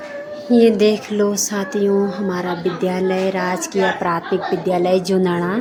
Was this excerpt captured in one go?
yes; 0 cuts

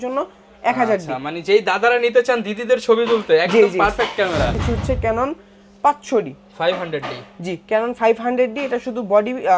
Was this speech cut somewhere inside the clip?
yes; 1 cut; at 4.6 s

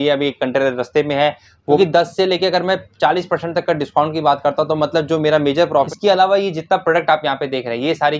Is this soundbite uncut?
no; 2 cuts; at 1.8 s, 5.9 s

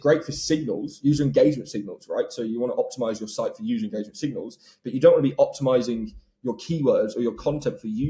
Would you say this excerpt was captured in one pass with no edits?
yes; 0 cuts

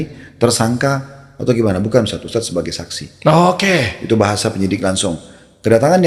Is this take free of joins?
yes; 0 cuts

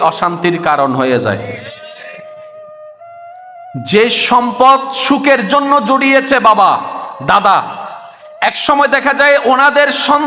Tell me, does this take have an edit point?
no; 0 cuts

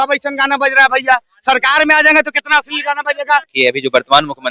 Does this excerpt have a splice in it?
yes; 1 cut; at 3.5 s

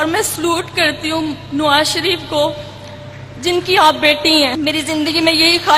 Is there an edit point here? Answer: yes; 1 cut; at 4.5 s

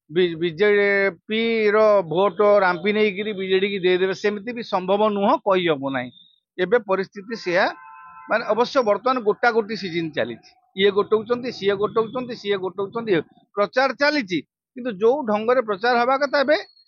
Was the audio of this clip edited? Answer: yes; 1 cut; at 13.4 s

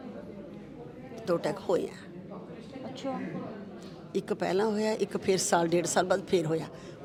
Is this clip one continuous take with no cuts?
yes; 0 cuts

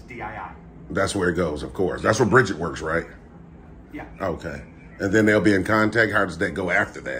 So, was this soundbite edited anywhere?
no; 0 cuts

